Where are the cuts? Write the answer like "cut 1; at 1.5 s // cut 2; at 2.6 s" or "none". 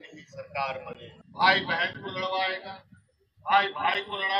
cut 1; at 1.1 s